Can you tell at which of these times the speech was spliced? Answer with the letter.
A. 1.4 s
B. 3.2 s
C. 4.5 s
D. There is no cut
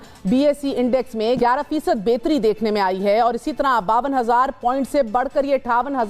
A